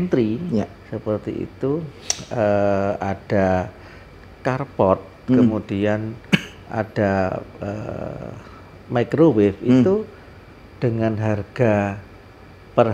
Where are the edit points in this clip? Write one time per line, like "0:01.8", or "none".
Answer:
none